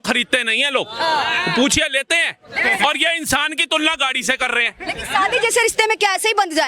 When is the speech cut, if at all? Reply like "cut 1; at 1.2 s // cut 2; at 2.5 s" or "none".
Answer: none